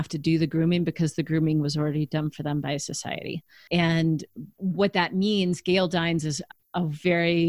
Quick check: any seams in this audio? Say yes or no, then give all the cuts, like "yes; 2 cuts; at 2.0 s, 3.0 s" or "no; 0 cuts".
yes; 2 cuts; at 3.6 s, 6.5 s